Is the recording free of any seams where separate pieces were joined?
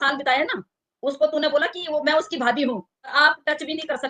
no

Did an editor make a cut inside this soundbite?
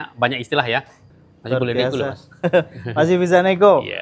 yes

